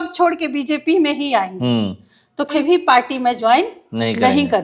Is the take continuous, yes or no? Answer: no